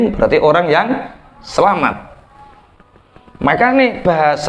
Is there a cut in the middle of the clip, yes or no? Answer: no